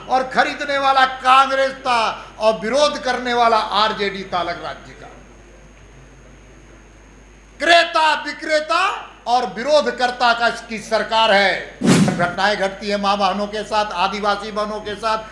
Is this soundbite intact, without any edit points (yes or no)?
no